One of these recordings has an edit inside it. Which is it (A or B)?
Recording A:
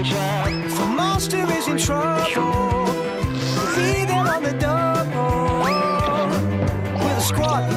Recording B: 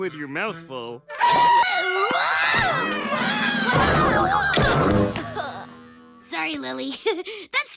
B